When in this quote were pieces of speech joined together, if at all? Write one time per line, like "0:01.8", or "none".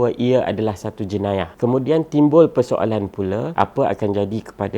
0:01.5
0:03.5